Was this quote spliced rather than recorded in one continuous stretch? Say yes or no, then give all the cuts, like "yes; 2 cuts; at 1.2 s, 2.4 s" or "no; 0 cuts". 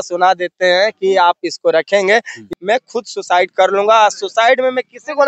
yes; 1 cut; at 2.4 s